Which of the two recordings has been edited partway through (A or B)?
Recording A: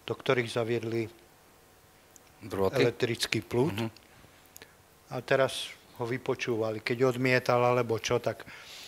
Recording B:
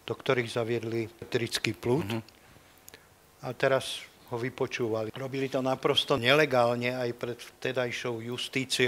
B